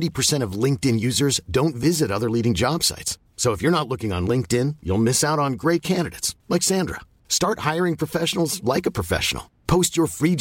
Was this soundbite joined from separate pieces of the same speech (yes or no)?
no